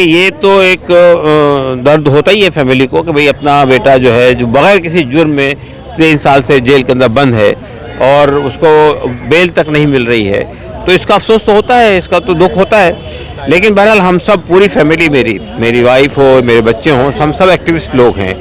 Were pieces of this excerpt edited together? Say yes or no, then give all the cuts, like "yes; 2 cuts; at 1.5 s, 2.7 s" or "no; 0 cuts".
no; 0 cuts